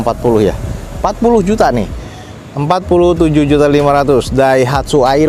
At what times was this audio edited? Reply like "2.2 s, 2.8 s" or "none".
none